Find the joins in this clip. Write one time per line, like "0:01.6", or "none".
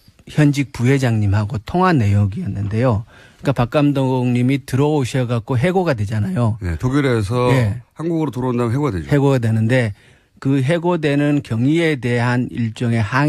none